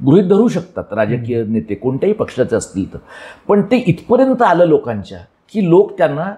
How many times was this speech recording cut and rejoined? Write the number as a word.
zero